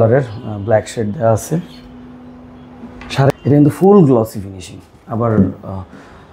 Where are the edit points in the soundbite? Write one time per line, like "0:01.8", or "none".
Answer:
0:03.3